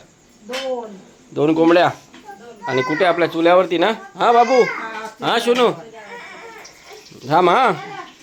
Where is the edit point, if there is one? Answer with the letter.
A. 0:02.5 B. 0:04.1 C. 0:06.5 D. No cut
D